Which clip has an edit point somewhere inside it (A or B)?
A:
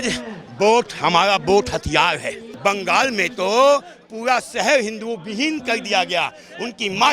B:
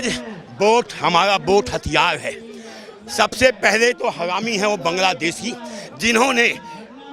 A